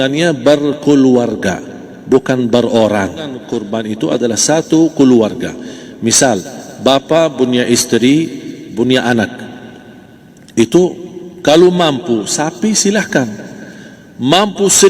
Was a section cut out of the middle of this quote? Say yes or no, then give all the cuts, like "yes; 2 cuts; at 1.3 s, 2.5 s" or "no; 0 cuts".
yes; 1 cut; at 3.4 s